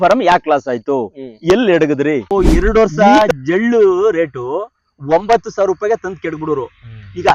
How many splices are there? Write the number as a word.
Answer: one